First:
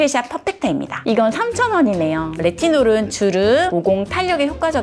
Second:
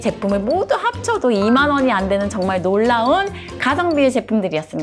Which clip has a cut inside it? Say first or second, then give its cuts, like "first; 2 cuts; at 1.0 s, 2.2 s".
first; 3 cuts; at 0.9 s, 2.3 s, 3.7 s